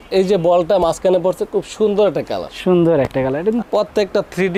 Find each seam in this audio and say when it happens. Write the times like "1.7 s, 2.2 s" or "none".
none